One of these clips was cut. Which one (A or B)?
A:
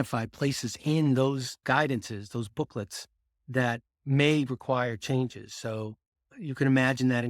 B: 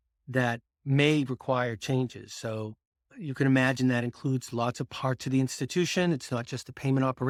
A